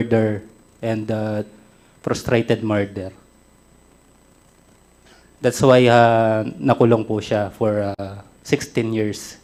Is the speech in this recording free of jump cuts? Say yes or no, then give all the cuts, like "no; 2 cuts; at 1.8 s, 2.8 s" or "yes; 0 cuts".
yes; 0 cuts